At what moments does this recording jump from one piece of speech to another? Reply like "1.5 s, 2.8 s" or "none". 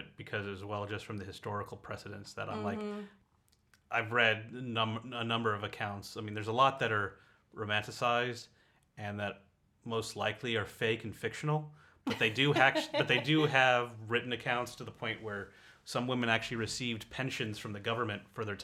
3.2 s